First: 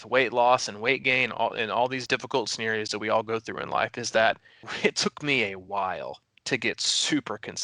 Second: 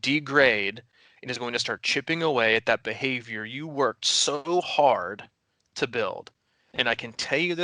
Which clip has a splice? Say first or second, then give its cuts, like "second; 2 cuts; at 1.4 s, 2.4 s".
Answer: first; 2 cuts; at 2.0 s, 4.6 s